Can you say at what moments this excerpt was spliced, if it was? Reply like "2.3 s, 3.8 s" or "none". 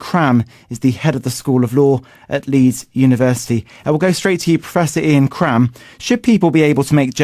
3.6 s